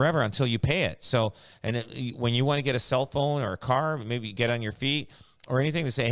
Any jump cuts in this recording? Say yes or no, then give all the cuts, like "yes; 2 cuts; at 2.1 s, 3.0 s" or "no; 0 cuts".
no; 0 cuts